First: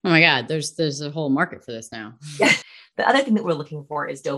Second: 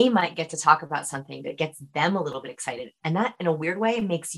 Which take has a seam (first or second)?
first